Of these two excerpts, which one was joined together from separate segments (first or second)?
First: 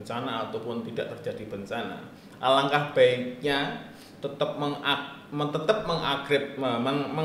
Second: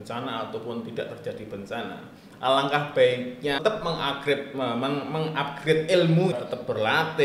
second